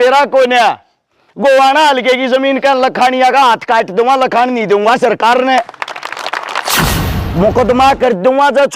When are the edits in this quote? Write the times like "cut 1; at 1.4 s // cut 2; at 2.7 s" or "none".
cut 1; at 6.9 s

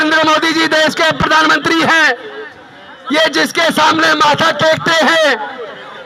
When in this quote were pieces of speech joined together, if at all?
none

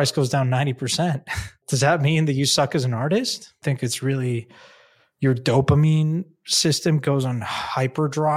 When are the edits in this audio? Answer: cut 1; at 1.6 s // cut 2; at 3.6 s

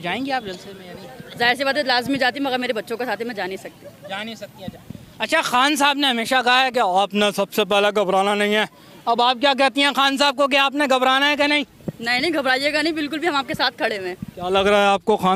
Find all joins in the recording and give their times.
none

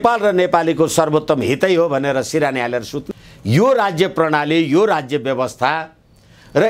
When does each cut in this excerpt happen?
cut 1; at 3.0 s

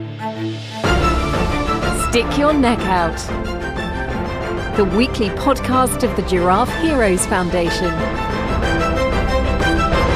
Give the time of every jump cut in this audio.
none

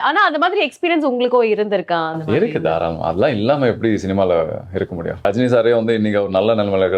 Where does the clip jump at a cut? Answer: cut 1; at 5.2 s

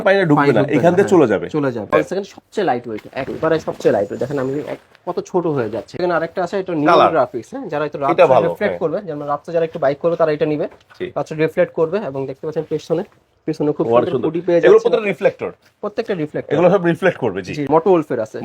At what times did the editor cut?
cut 1; at 1.9 s // cut 2; at 5.9 s // cut 3; at 17.7 s

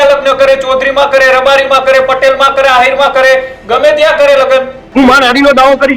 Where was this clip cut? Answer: cut 1; at 4.8 s

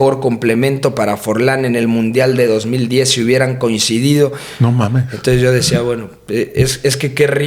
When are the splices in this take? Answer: none

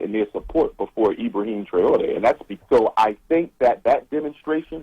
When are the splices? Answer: cut 1; at 2.5 s

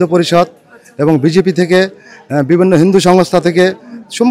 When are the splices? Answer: none

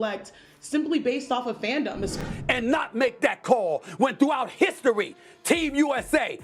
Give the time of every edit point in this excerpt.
cut 1; at 2.2 s

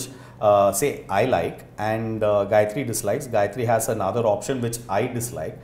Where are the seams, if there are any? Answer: none

